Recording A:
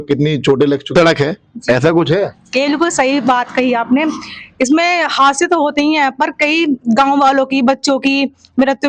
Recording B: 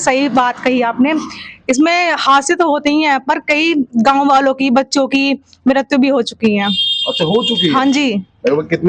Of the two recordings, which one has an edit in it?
A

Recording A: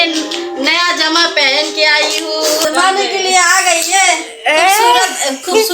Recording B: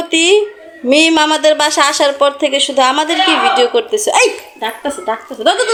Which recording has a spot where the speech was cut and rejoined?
A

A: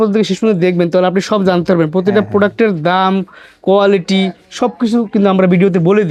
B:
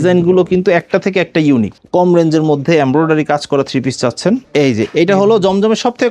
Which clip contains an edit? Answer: B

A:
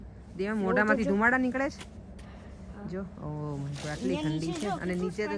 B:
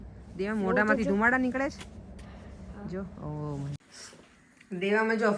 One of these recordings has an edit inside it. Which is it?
B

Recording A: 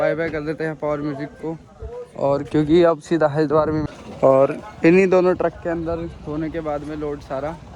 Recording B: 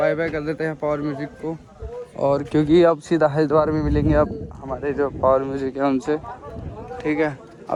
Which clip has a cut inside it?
A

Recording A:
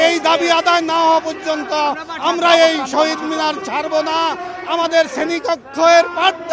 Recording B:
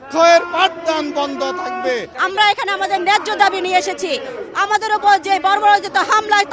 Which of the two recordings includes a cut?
B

